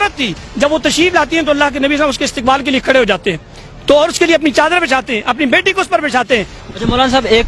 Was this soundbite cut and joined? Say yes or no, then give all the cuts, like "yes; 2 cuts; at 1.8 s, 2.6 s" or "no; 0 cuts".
yes; 1 cut; at 6.5 s